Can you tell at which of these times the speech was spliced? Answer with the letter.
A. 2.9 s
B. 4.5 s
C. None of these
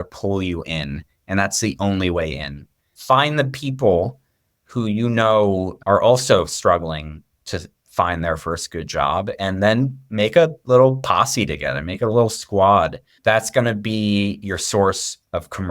A